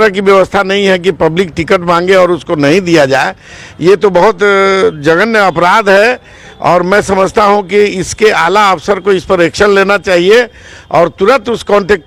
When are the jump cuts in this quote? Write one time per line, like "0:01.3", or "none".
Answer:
none